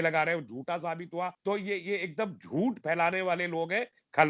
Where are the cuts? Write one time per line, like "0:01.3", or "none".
0:01.4